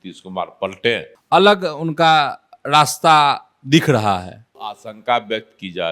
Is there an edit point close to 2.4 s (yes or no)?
no